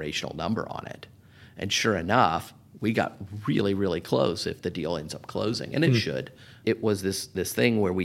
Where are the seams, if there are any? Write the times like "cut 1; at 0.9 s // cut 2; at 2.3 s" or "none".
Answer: cut 1; at 6.6 s